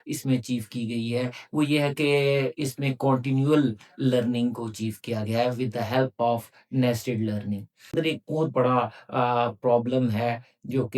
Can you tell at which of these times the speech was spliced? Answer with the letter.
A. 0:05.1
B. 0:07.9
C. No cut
B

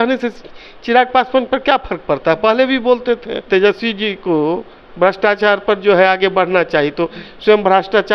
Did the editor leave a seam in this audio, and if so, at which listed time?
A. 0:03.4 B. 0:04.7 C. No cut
A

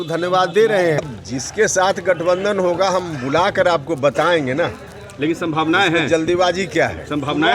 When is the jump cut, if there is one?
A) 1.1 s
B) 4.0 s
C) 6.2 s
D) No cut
A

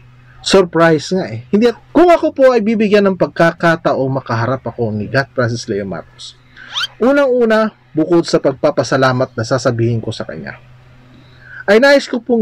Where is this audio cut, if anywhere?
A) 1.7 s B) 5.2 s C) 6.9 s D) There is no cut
A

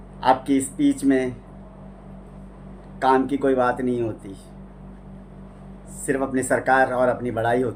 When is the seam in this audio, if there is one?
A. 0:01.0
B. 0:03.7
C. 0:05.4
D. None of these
D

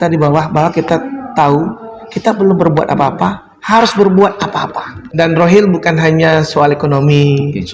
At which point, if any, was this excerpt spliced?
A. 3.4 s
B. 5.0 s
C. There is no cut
B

